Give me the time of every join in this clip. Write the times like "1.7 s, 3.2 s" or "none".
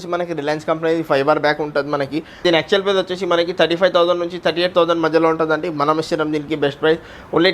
2.4 s